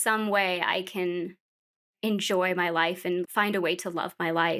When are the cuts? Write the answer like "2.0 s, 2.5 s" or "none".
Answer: 3.2 s